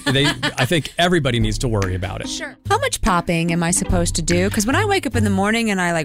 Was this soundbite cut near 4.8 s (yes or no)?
no